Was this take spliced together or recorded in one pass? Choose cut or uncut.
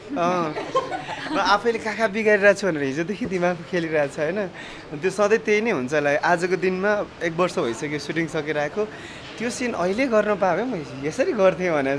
uncut